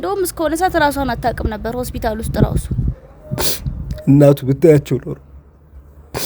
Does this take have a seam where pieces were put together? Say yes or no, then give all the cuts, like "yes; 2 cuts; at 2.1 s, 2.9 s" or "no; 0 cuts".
yes; 1 cut; at 2.9 s